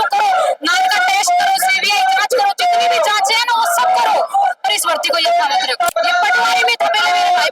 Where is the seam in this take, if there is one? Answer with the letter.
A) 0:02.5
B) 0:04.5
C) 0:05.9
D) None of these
C